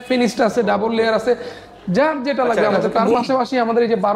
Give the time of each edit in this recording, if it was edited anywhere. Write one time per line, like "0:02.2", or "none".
0:02.9